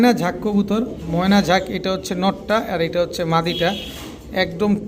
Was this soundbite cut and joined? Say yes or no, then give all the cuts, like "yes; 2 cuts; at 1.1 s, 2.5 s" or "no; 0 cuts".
no; 0 cuts